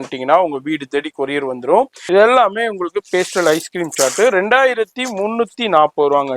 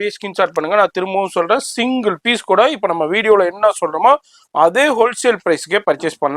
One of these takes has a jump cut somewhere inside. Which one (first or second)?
first